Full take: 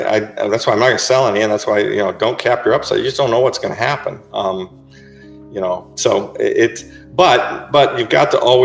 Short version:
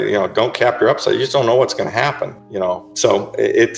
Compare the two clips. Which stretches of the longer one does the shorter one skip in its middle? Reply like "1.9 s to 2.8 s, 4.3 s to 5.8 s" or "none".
4.2 s to 5.4 s

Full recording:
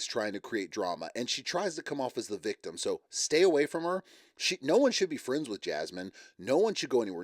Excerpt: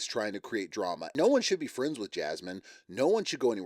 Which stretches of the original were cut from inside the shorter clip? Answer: 1.0 s to 4.5 s

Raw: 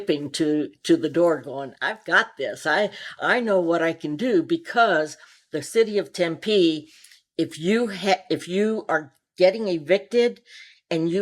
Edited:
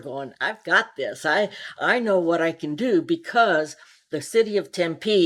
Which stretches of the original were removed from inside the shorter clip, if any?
none

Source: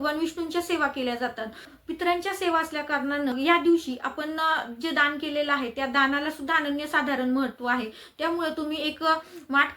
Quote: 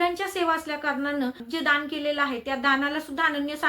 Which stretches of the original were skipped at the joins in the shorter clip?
3.4 s to 4.6 s

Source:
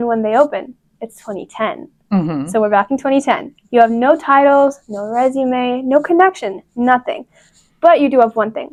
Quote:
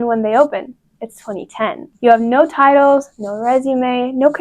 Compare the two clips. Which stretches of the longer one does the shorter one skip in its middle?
1.9 s to 3.6 s

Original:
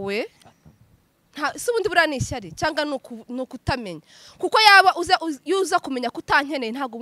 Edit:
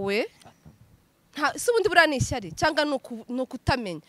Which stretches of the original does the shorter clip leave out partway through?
none

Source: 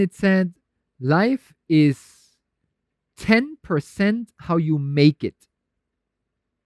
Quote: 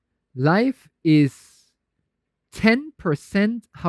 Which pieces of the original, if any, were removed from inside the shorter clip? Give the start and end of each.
none

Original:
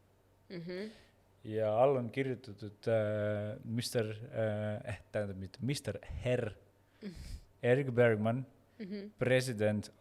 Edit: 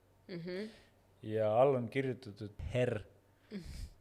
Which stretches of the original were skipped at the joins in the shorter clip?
2.7 s to 6.0 s

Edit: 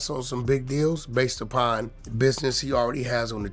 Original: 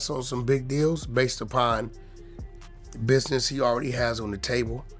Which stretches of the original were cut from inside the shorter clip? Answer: 2.0 s to 2.9 s

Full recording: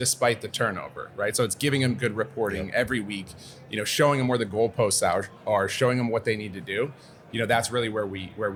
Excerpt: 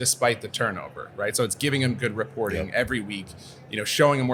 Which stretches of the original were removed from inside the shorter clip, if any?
none

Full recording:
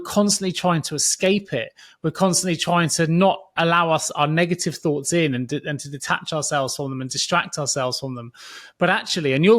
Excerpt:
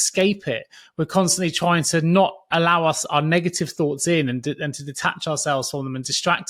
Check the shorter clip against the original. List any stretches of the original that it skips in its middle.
none

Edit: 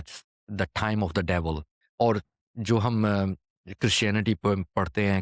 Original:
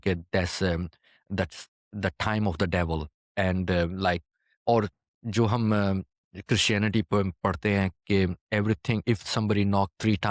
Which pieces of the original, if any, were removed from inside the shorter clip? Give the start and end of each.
3.2 s to 4.4 s

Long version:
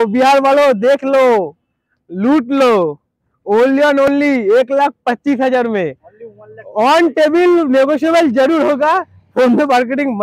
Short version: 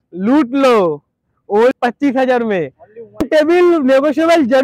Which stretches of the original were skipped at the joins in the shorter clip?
3.7 s to 5.0 s, 6.5 s to 7.1 s

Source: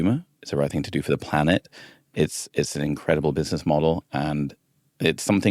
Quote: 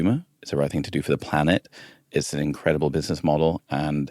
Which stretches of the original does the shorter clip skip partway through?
2.0 s to 2.4 s

